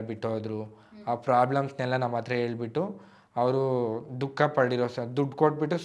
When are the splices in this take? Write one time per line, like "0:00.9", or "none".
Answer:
none